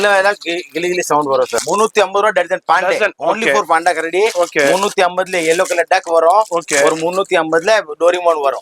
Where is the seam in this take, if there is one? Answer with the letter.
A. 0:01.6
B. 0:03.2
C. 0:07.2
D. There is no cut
A